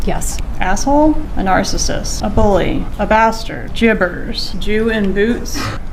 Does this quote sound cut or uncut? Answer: uncut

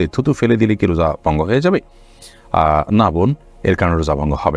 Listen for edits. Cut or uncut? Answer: uncut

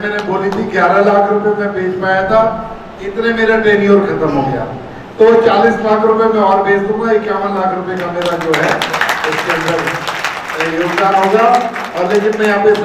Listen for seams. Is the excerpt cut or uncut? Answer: uncut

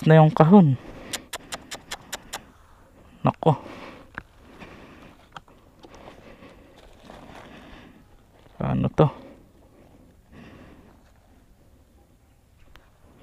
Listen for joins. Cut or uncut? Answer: uncut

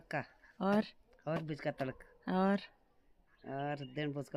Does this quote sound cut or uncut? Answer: uncut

